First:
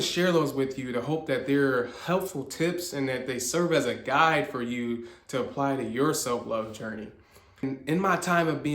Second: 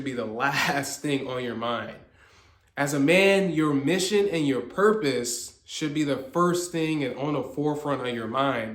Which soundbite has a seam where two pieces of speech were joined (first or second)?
first